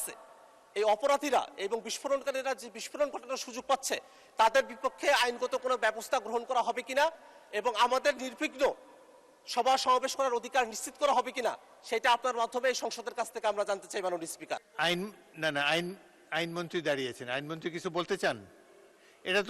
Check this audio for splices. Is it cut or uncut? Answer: cut